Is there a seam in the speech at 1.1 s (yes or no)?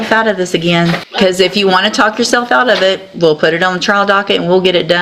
yes